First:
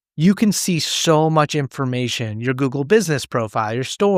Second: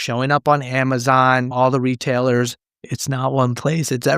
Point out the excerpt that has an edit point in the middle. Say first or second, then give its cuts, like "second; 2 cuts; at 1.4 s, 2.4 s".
second; 1 cut; at 2.9 s